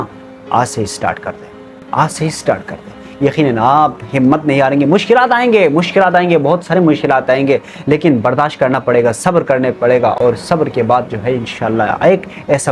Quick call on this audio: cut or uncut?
uncut